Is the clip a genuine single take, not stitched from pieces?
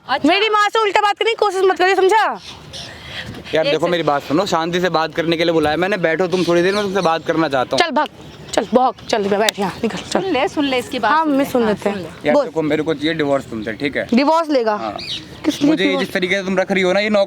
yes; 0 cuts

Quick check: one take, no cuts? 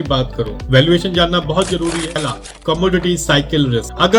no; 1 cut; at 2.2 s

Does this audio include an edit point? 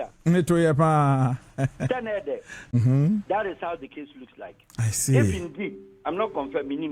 yes; 1 cut; at 2.7 s

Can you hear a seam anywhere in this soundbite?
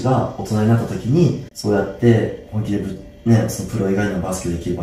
yes; 1 cut; at 1.5 s

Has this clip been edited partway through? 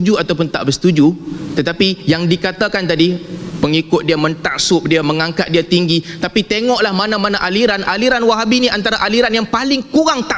no; 0 cuts

